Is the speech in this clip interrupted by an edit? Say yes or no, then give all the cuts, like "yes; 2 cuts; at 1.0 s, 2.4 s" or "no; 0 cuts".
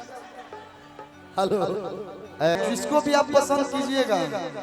yes; 1 cut; at 2.6 s